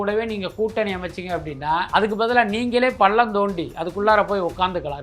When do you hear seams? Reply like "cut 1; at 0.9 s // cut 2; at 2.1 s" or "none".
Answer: cut 1; at 1.9 s